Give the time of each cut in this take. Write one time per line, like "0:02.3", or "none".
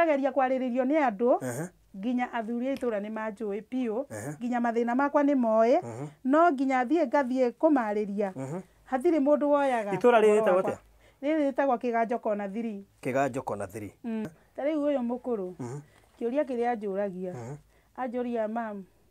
0:14.3